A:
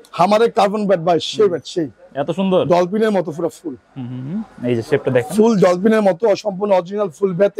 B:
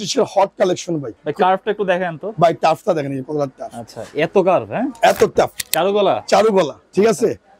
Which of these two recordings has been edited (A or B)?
B